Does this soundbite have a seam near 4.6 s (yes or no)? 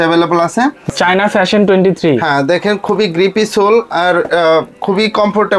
no